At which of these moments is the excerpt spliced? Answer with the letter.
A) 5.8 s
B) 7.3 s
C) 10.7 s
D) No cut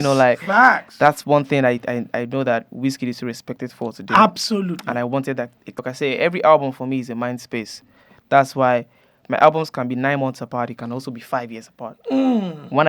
A